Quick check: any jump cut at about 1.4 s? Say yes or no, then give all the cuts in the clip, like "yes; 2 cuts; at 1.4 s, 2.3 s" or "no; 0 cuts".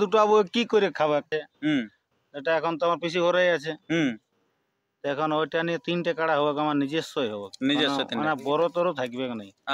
yes; 1 cut; at 1.4 s